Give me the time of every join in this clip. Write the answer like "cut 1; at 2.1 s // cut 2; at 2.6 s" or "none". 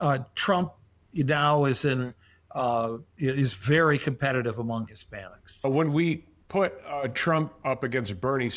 cut 1; at 5.6 s